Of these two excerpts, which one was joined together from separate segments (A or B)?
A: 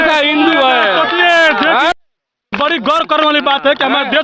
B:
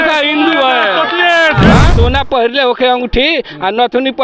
B